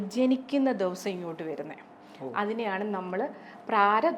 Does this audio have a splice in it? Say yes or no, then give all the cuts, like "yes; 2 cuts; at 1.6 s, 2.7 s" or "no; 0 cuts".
no; 0 cuts